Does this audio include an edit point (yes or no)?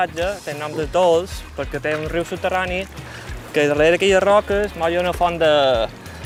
no